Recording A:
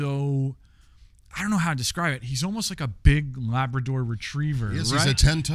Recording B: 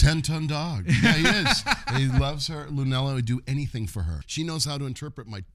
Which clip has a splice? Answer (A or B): B